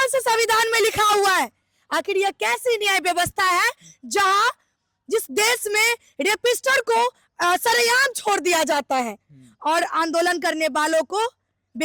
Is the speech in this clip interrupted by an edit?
no; 0 cuts

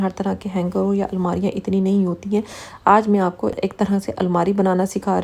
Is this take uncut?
no; 1 cut; at 3.6 s

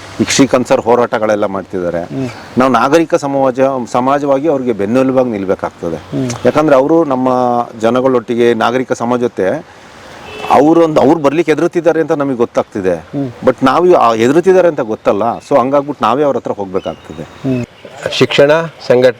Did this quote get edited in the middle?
yes; 1 cut; at 17.8 s

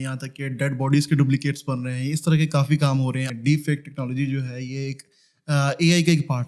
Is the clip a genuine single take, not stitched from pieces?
no; 1 cut; at 3.3 s

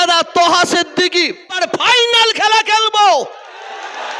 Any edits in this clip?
yes; 1 cut; at 1.6 s

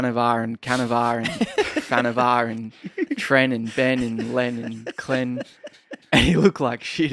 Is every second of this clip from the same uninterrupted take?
yes; 0 cuts

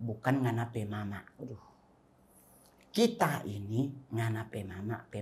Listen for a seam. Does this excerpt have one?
no; 0 cuts

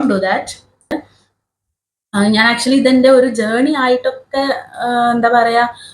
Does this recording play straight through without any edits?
no; 1 cut; at 0.9 s

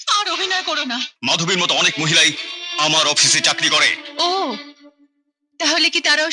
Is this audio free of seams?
no; 1 cut; at 1.1 s

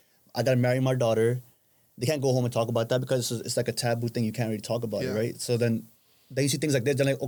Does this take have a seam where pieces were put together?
no; 0 cuts

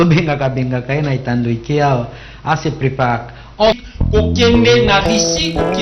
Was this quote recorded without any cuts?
no; 1 cut; at 3.8 s

